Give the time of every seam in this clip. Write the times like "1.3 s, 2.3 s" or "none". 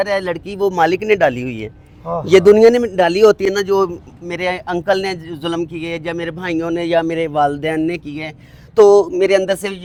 none